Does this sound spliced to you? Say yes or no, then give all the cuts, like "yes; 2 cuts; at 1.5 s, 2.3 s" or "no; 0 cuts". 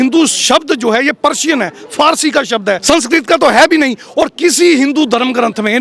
yes; 1 cut; at 2.8 s